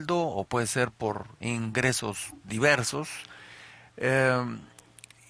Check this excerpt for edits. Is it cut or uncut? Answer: uncut